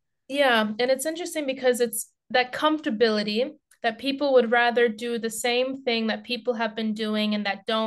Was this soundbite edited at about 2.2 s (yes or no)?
no